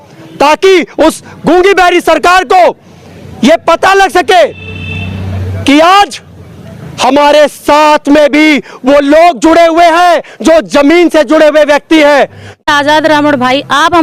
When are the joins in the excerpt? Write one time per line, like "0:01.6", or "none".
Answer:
0:12.6